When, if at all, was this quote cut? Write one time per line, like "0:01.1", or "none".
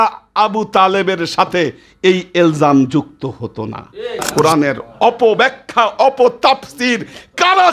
0:04.3